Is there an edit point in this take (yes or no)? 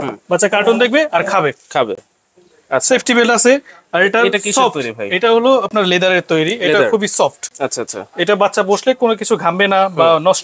no